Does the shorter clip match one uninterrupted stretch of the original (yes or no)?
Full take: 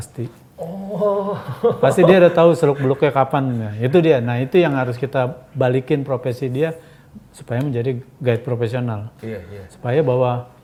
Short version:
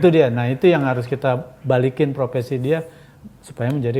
yes